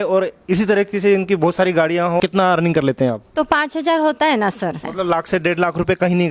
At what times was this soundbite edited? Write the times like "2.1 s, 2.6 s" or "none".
2.2 s, 4.8 s

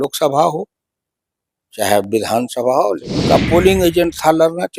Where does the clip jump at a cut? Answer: 3.3 s

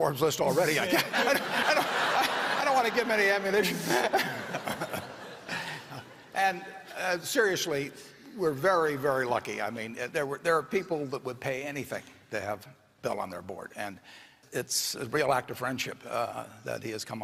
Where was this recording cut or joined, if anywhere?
none

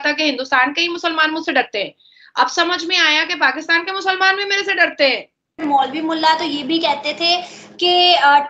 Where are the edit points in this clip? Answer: 5.6 s

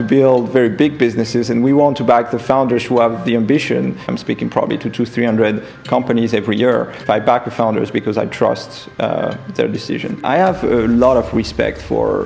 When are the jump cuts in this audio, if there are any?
4.1 s, 7.0 s, 10.2 s

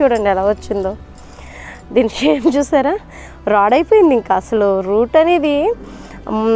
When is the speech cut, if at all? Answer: none

